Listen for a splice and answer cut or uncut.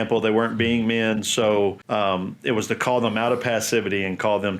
cut